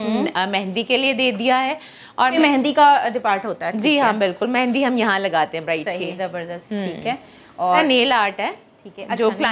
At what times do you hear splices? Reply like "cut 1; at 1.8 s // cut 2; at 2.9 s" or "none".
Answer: cut 1; at 2.3 s // cut 2; at 7.8 s